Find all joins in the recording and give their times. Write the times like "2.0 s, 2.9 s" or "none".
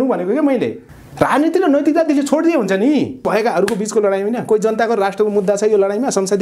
3.2 s